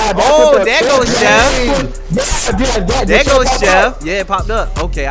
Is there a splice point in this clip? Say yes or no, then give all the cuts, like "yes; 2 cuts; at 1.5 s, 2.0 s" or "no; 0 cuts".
no; 0 cuts